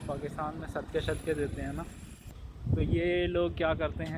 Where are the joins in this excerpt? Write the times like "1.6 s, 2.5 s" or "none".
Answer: none